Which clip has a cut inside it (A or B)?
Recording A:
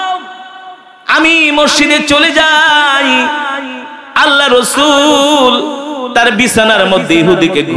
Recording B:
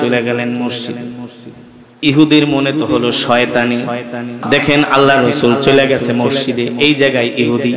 B